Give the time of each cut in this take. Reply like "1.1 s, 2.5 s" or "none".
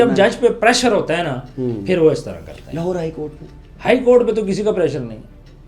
none